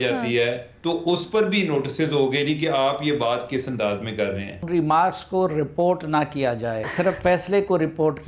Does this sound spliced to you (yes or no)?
yes